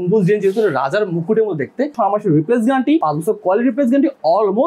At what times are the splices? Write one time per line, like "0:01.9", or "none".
0:01.9